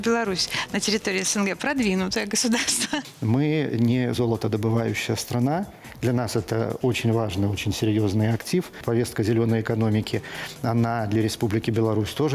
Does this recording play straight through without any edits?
no; 2 cuts; at 3.1 s, 8.8 s

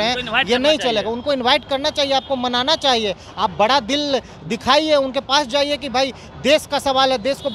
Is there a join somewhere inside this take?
no; 0 cuts

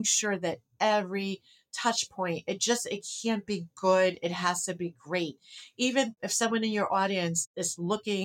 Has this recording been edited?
yes; 1 cut; at 6.2 s

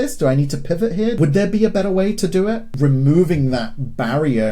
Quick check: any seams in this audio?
yes; 2 cuts; at 1.2 s, 2.7 s

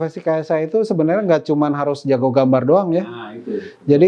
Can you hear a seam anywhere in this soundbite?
no; 0 cuts

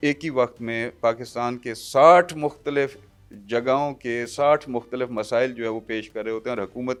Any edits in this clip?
no; 0 cuts

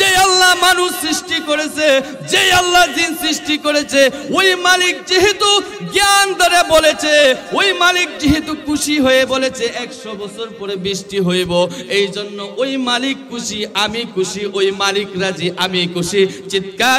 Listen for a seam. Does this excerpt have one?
no; 0 cuts

